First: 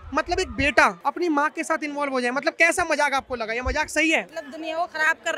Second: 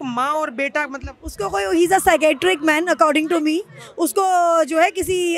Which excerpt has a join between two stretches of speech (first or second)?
first